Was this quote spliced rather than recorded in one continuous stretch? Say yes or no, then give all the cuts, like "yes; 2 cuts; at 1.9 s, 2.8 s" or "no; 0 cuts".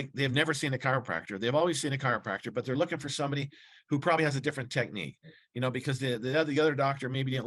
no; 0 cuts